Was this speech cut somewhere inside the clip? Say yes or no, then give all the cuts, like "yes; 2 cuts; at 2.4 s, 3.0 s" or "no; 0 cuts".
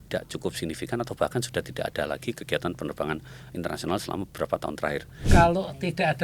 yes; 1 cut; at 5.2 s